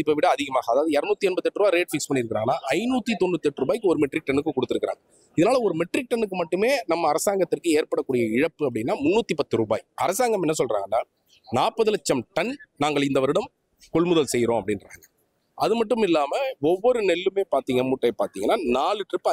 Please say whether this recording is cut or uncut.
uncut